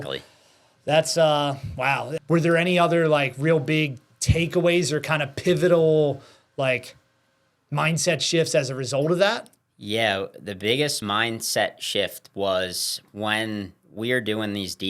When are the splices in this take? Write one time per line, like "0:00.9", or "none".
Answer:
0:02.1
0:11.0